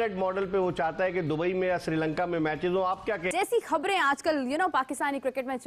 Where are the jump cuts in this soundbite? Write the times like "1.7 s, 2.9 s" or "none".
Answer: 3.3 s